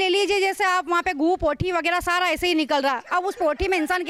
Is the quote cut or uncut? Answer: uncut